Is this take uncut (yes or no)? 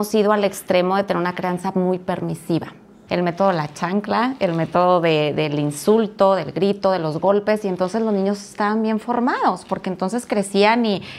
no